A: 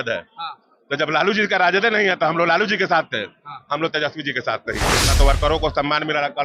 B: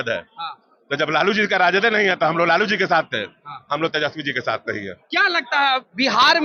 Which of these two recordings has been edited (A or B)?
A